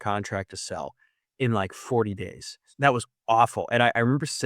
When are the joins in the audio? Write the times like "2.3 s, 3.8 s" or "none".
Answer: 2.6 s